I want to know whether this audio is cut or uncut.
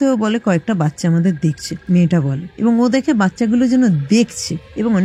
cut